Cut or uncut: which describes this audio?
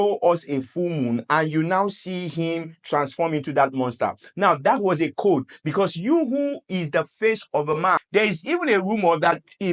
cut